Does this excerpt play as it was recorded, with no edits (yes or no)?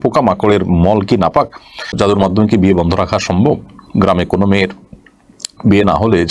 no